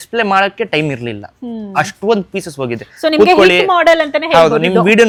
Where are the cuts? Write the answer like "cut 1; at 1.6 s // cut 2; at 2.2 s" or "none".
none